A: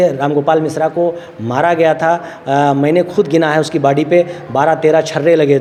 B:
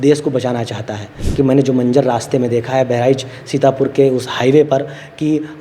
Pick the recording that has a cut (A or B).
B